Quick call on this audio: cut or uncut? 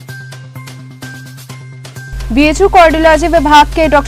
cut